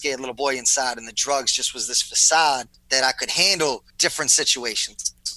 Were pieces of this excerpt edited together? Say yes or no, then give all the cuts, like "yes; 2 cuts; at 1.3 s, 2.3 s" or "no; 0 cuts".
yes; 2 cuts; at 2.8 s, 3.9 s